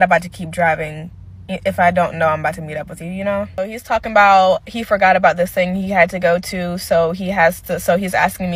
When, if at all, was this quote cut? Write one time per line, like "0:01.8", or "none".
0:03.6